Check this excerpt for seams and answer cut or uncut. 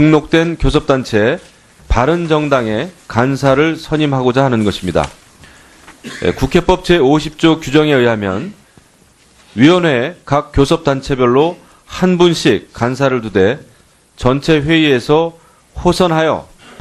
uncut